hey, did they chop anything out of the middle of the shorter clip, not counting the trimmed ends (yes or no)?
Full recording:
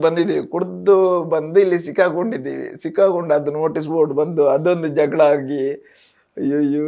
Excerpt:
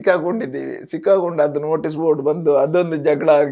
no